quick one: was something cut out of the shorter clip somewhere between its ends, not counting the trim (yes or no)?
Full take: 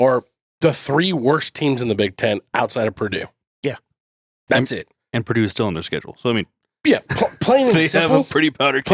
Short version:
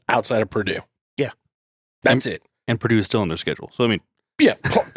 no